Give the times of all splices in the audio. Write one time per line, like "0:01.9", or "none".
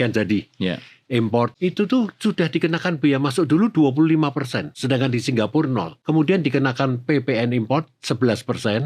0:01.5
0:04.7
0:05.9